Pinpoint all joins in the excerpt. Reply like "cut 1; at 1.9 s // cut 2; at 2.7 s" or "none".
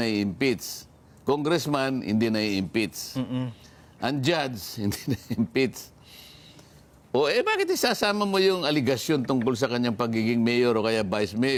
none